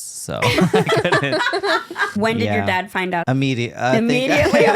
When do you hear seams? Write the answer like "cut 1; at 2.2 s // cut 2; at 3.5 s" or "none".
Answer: cut 1; at 2.1 s // cut 2; at 3.2 s